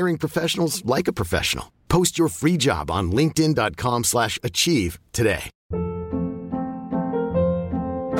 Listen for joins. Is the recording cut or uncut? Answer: cut